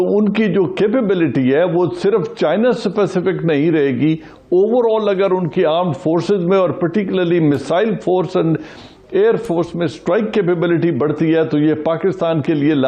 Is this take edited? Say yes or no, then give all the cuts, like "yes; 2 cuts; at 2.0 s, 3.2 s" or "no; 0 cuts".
no; 0 cuts